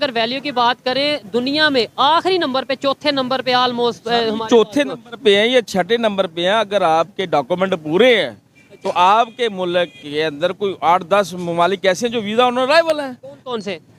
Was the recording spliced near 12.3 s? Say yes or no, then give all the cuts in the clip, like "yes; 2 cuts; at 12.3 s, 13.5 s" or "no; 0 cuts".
no; 0 cuts